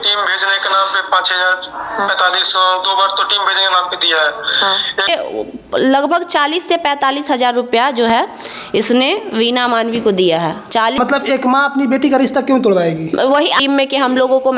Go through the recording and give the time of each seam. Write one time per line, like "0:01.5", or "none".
0:05.1
0:11.0
0:13.6